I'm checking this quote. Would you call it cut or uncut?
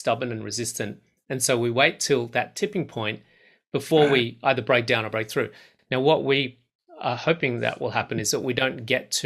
uncut